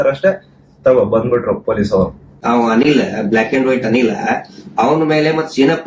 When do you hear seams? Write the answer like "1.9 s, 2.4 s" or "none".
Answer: 2.3 s